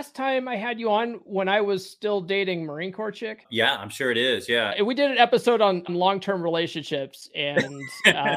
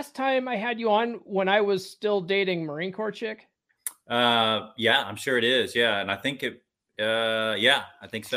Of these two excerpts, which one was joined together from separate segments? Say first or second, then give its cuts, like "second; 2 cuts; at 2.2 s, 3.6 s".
first; 3 cuts; at 3.4 s, 4.7 s, 5.9 s